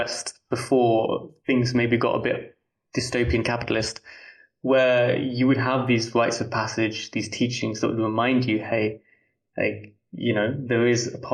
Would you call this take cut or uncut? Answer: uncut